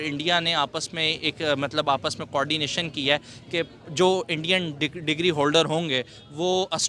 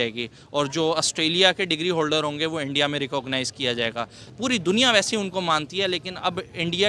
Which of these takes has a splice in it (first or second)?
second